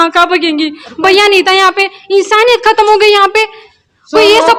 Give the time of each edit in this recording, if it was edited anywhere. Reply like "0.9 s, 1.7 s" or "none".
none

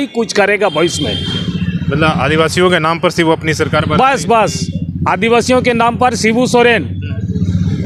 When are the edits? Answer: none

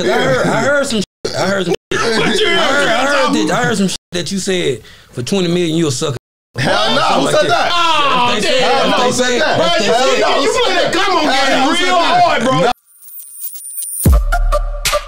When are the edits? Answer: 12.7 s

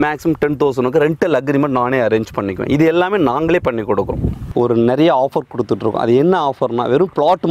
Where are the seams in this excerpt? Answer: 4.5 s

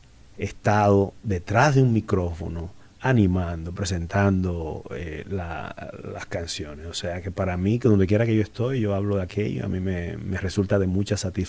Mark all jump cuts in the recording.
none

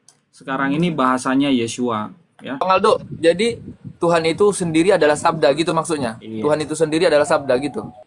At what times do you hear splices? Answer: 2.6 s

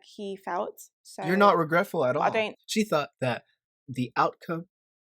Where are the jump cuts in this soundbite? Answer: 2.5 s

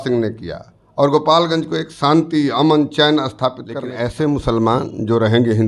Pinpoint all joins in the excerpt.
3.9 s

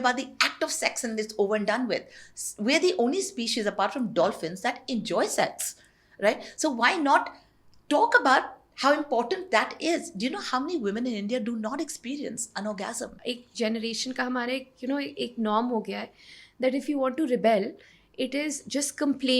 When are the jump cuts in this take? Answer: 13.2 s

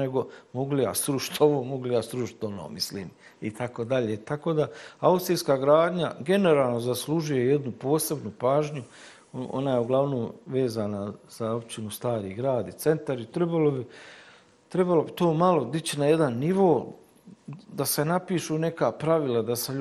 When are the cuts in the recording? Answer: none

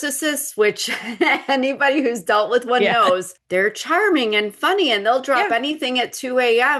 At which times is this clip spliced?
3.3 s

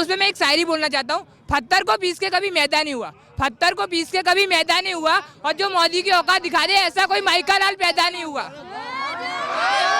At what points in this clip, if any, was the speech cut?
none

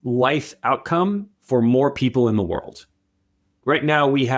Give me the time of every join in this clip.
3.5 s

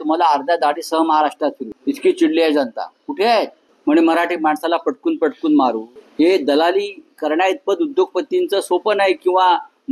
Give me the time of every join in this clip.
1.7 s, 3.6 s, 5.9 s

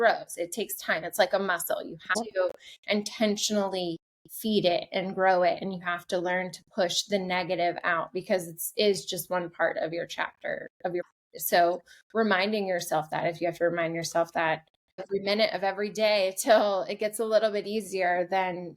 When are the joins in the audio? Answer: 2.1 s, 11.0 s, 15.0 s

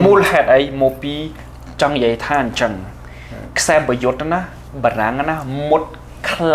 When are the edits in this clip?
none

